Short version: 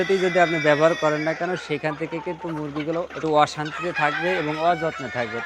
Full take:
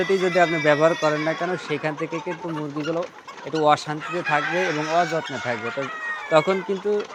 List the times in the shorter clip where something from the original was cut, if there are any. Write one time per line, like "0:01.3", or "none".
0:03.1